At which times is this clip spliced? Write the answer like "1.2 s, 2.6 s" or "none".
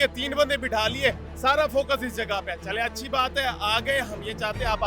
none